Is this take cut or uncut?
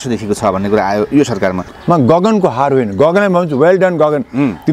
cut